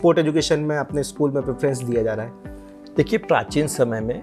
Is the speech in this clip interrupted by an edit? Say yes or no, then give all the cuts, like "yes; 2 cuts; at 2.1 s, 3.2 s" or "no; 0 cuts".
no; 0 cuts